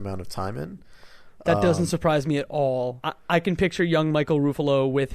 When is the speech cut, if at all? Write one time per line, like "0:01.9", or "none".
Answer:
0:03.1